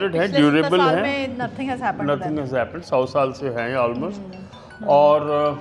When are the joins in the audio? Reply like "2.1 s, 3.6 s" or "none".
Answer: none